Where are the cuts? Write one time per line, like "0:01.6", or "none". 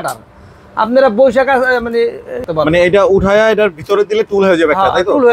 0:02.4